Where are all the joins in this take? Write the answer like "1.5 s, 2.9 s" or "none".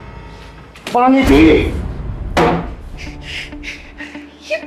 0.9 s